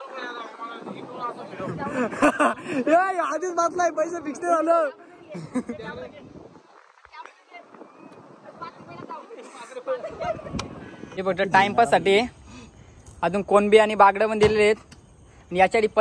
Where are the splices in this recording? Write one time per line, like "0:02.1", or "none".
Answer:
0:11.2